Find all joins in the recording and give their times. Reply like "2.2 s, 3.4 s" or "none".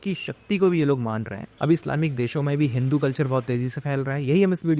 none